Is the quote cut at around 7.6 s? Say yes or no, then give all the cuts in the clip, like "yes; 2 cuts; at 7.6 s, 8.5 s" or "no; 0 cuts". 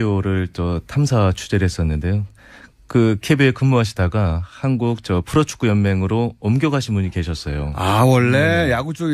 yes; 1 cut; at 7.6 s